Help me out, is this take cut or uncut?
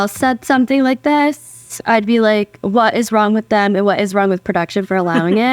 uncut